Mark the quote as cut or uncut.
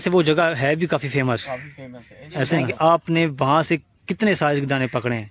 cut